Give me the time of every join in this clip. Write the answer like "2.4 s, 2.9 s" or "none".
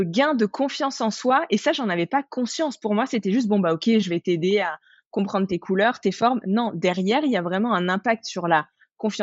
none